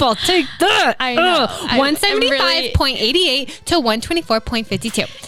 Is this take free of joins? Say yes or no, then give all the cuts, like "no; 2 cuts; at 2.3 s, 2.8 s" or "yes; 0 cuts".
yes; 0 cuts